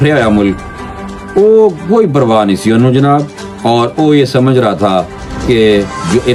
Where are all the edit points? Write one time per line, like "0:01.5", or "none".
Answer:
none